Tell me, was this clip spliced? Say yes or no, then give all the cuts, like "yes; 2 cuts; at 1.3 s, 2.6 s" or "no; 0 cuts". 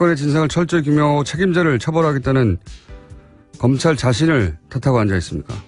yes; 1 cut; at 4.3 s